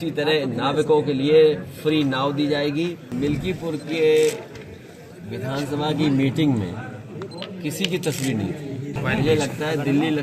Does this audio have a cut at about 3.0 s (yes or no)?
yes